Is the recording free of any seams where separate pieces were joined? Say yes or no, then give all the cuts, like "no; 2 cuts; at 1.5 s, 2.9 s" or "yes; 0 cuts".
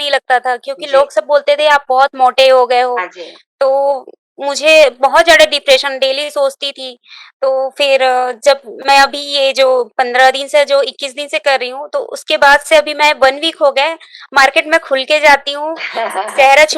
yes; 0 cuts